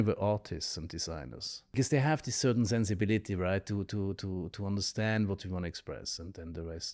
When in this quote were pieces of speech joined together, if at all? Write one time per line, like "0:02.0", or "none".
0:01.8